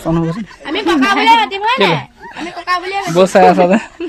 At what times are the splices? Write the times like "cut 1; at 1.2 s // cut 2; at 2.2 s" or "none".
none